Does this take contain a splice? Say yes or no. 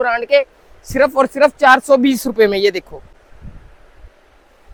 no